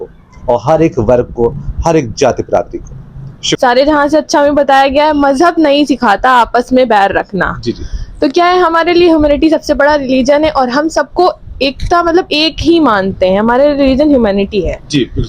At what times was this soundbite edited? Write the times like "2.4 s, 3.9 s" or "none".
3.6 s